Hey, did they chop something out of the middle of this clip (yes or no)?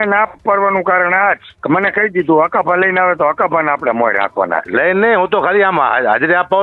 yes